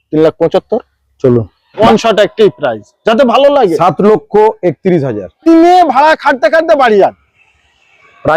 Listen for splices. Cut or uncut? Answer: cut